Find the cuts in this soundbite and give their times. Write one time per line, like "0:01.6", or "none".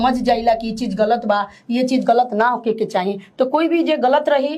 none